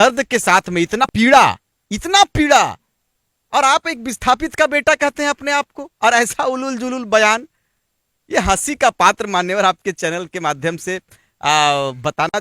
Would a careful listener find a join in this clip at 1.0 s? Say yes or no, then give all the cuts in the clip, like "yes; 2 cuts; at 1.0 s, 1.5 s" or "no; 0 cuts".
yes; 1 cut; at 1.0 s